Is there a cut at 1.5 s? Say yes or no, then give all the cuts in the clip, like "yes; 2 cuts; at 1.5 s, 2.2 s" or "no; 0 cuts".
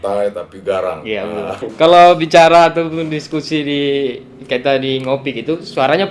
yes; 1 cut; at 1.5 s